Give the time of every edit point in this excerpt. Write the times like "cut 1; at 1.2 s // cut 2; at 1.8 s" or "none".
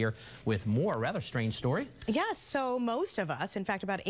cut 1; at 1.1 s